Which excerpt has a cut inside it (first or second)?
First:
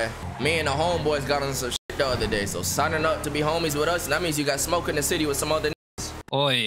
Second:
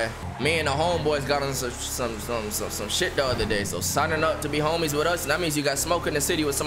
first